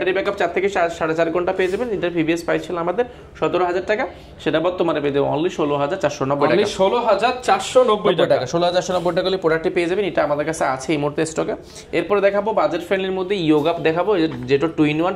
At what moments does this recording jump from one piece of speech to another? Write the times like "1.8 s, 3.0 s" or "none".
none